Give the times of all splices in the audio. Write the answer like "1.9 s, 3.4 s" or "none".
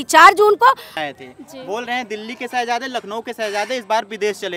0.9 s